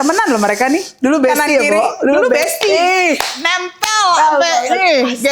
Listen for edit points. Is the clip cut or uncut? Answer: uncut